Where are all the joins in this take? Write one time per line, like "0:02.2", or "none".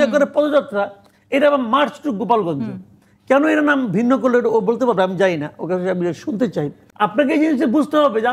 0:06.8